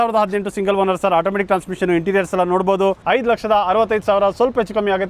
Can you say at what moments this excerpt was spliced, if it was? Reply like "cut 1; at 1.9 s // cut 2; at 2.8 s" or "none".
cut 1; at 3.0 s